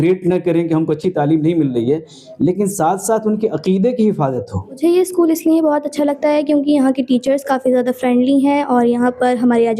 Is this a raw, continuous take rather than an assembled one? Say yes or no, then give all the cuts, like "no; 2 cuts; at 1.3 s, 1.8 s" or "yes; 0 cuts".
no; 1 cut; at 4.8 s